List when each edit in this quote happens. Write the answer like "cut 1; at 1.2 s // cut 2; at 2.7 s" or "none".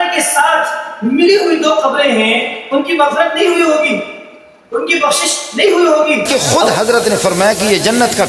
cut 1; at 6.2 s

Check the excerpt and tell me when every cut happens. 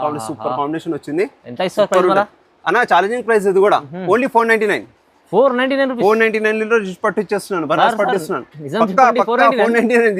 none

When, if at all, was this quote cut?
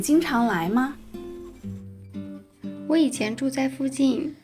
cut 1; at 1.0 s // cut 2; at 2.3 s

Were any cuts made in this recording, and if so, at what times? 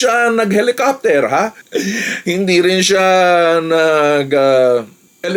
none

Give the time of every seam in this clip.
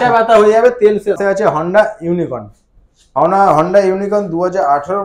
cut 1; at 1.2 s

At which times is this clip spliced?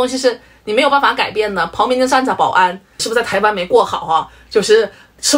cut 1; at 3.0 s

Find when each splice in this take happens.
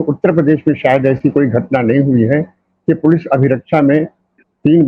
none

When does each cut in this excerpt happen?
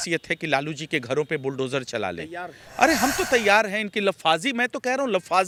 none

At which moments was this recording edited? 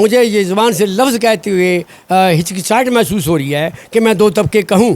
none

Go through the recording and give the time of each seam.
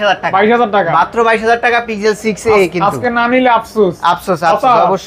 none

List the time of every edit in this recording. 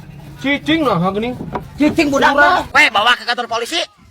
cut 1; at 2.7 s

